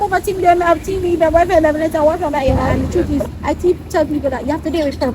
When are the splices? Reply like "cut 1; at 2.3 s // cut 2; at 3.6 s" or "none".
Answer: cut 1; at 2.7 s

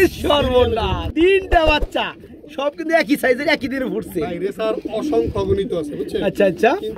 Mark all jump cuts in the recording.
cut 1; at 1.0 s

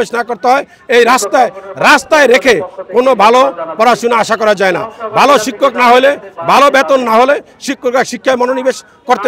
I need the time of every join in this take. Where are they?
none

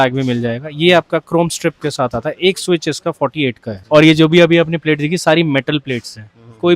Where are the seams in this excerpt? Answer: cut 1; at 3.8 s

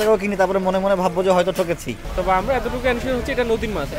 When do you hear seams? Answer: cut 1; at 2.0 s

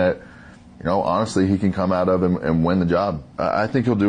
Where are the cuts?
none

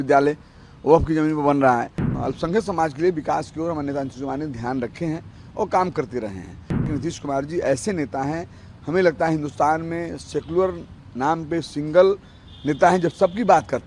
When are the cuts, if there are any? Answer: cut 1; at 2.0 s // cut 2; at 6.9 s

